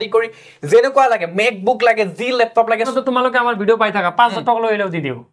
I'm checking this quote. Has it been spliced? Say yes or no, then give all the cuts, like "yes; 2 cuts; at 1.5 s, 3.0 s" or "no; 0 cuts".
yes; 1 cut; at 2.9 s